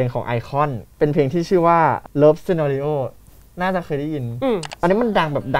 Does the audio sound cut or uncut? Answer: cut